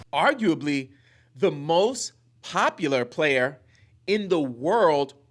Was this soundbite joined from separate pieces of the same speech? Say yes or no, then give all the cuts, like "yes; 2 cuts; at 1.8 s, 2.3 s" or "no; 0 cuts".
no; 0 cuts